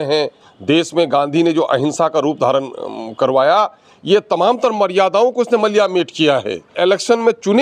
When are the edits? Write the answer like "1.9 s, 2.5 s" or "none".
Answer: 6.7 s